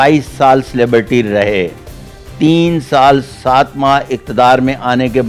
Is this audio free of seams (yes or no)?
yes